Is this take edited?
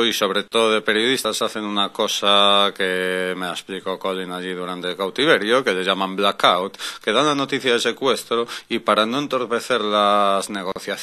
no; 0 cuts

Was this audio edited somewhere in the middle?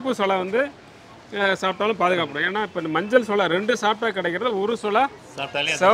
no; 0 cuts

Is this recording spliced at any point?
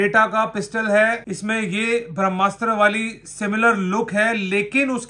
yes; 1 cut; at 1.3 s

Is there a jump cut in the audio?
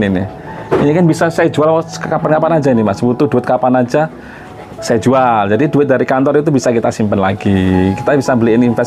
no; 0 cuts

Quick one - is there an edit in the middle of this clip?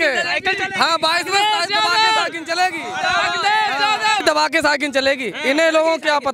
no; 0 cuts

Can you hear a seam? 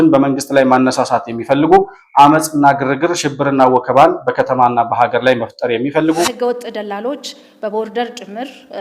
yes; 1 cut; at 6.2 s

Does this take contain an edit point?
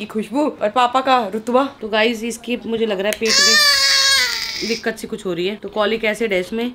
no; 0 cuts

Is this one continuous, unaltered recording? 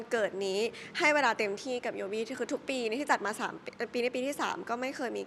yes; 0 cuts

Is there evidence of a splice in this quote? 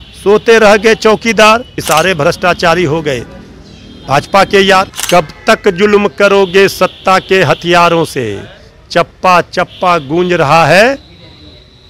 yes; 2 cuts; at 1.7 s, 5.0 s

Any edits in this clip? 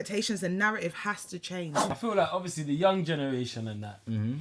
yes; 1 cut; at 2.0 s

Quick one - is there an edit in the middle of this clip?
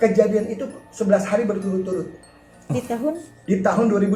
no; 0 cuts

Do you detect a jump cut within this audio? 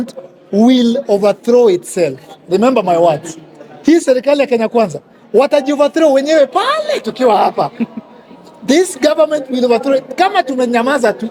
no; 0 cuts

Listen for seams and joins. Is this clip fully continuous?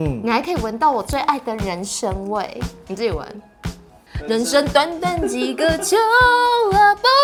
yes; 0 cuts

